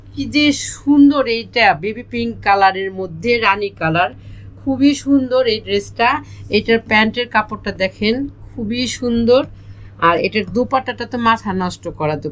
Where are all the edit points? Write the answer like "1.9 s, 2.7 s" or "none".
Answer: none